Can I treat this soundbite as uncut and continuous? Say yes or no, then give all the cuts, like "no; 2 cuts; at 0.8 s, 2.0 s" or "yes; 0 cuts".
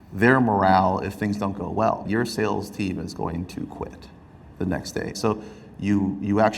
no; 2 cuts; at 2.0 s, 5.2 s